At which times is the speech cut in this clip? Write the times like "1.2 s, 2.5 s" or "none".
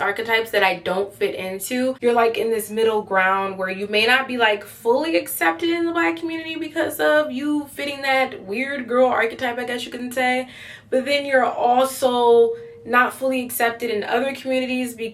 2.0 s